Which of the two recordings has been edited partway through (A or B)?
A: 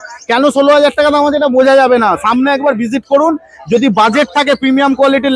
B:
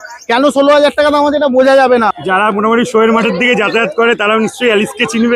B